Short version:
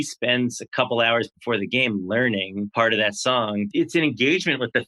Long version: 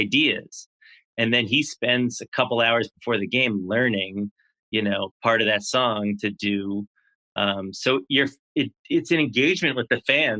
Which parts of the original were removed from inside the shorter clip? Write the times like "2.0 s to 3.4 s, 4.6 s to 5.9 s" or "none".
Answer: 4.3 s to 5.2 s, 6.2 s to 8.9 s